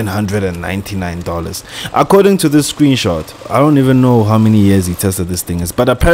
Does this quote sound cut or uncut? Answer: cut